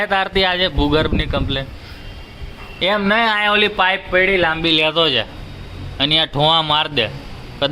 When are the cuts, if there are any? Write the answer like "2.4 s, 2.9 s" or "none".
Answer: none